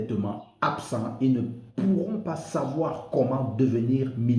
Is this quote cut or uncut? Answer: uncut